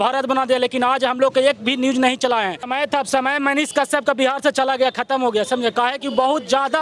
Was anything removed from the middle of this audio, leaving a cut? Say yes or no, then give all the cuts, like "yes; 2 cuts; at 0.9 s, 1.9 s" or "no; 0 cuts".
yes; 1 cut; at 2.7 s